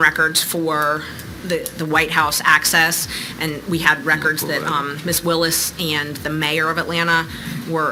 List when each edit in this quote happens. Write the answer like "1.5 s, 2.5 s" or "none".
none